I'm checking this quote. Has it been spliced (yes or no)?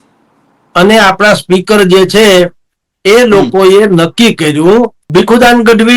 yes